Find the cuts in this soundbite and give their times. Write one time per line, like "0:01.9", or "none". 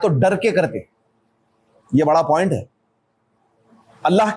none